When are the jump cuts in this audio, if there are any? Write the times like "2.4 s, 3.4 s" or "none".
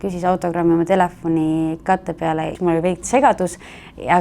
2.6 s